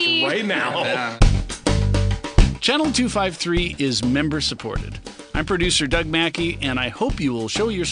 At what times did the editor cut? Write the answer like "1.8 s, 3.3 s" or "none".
1.1 s

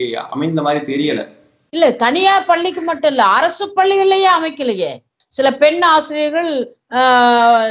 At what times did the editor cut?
5.2 s

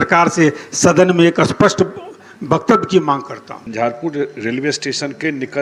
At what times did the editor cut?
3.7 s

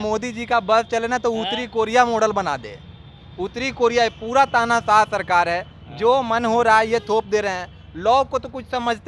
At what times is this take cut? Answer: none

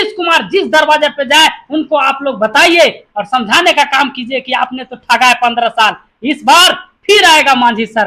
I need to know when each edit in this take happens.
none

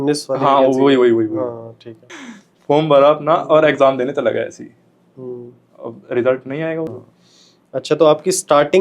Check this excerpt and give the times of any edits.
2.0 s, 7.0 s

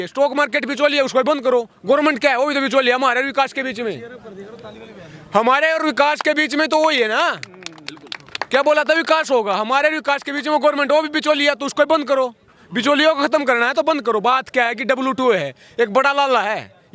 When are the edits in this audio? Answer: none

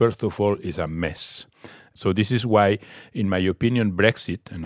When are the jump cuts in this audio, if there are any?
1.9 s

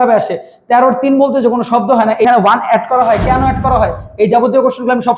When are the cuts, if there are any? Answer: 2.2 s

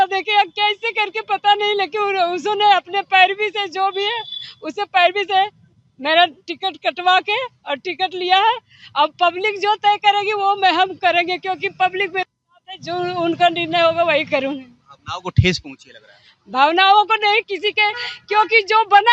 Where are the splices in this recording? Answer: none

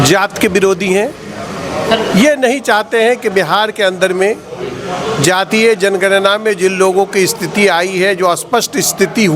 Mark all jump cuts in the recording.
none

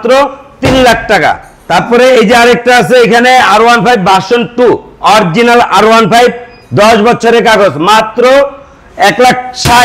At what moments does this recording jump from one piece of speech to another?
1.5 s

